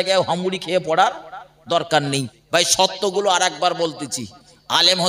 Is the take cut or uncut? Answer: cut